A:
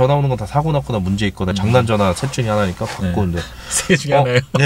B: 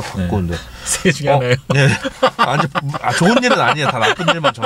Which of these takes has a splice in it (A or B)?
A